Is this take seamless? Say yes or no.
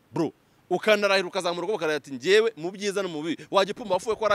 yes